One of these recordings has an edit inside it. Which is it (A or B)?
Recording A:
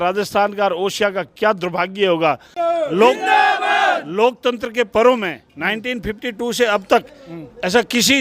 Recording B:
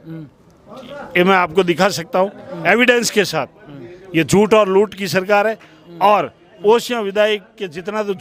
A